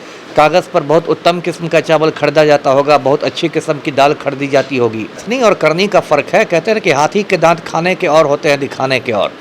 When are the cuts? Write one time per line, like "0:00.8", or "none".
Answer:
0:05.2